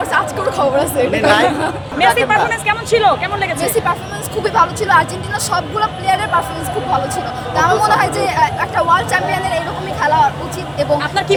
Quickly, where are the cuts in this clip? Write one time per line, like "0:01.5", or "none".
none